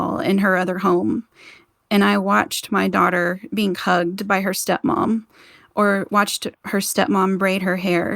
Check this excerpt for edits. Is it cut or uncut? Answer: cut